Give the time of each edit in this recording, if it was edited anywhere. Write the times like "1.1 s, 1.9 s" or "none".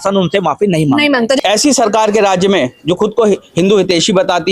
1.4 s